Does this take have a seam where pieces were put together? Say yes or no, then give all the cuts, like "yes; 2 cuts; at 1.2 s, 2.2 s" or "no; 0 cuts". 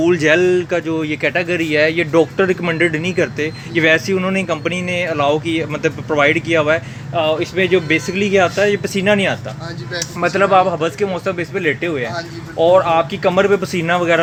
no; 0 cuts